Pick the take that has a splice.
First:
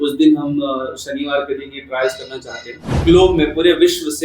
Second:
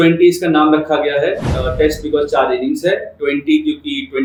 first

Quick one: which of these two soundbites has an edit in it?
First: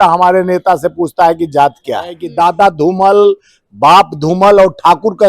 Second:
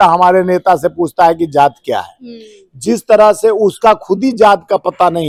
first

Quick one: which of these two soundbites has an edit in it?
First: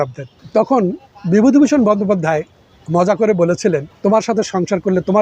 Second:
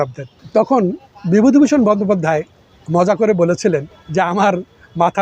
first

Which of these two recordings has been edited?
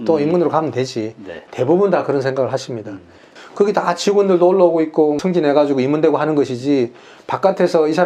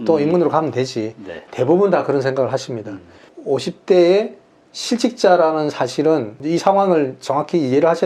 second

